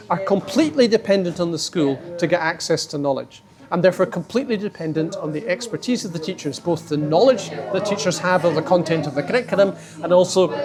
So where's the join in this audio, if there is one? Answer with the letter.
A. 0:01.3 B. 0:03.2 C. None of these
C